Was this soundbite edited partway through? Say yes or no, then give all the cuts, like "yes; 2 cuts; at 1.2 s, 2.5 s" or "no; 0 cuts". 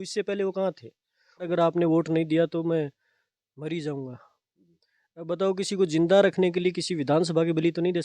yes; 1 cut; at 1.5 s